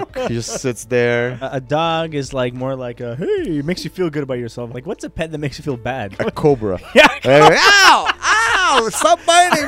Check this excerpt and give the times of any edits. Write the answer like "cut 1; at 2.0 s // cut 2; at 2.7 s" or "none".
cut 1; at 1.5 s // cut 2; at 4.6 s // cut 3; at 6.2 s